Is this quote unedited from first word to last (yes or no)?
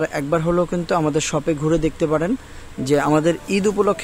yes